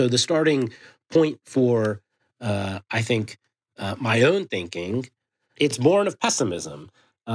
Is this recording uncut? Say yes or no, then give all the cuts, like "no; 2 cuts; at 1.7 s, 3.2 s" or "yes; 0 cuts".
no; 1 cut; at 5.8 s